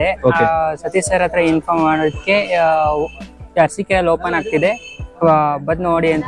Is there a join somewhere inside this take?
no; 0 cuts

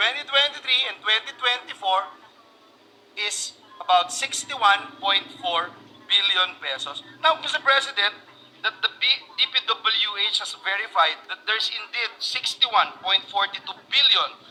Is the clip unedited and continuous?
yes; 0 cuts

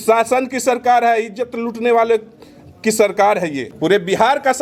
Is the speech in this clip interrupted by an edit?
yes; 1 cut; at 3.7 s

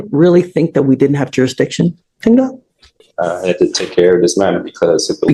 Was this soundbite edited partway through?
no; 0 cuts

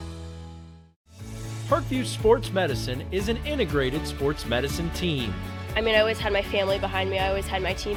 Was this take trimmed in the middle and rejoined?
no; 0 cuts

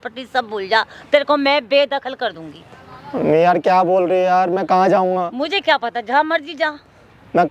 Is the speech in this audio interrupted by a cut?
no; 0 cuts

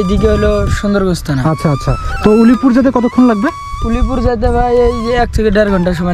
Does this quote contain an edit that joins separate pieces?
no; 0 cuts

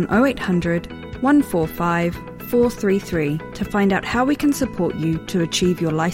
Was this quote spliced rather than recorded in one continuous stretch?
no; 0 cuts

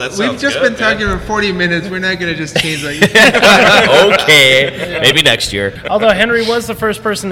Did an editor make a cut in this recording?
yes; 1 cut; at 5.8 s

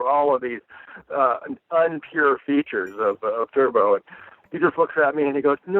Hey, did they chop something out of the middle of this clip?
yes; 1 cut; at 4.4 s

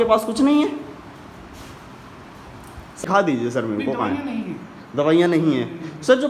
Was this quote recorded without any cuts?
no; 1 cut; at 3.0 s

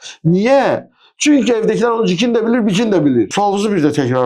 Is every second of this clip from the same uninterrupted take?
no; 1 cut; at 3.3 s

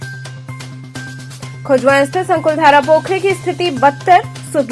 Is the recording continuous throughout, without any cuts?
yes; 0 cuts

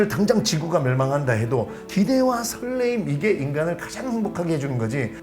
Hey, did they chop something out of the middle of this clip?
yes; 1 cut; at 1.8 s

